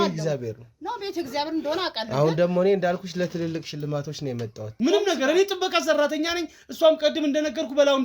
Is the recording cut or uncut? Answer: cut